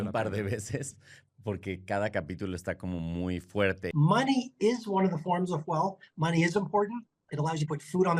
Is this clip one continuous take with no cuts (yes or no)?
no